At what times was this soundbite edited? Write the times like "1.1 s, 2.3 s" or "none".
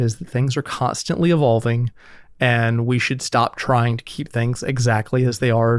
none